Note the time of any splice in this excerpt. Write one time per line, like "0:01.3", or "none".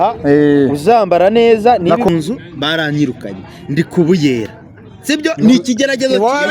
0:02.1